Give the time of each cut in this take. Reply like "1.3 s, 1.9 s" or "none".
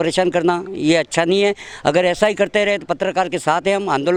none